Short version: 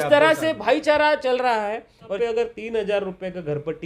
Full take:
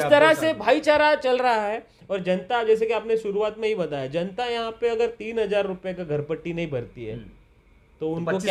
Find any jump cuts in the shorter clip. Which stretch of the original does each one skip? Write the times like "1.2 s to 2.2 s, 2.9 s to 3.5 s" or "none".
2.1 s to 4.7 s